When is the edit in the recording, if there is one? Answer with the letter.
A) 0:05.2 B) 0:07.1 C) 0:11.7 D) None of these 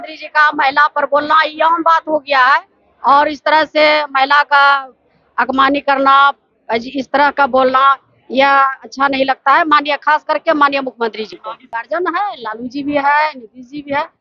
C